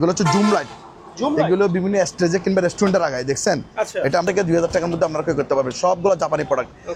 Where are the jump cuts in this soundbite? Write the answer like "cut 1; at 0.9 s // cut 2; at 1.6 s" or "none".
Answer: cut 1; at 4.2 s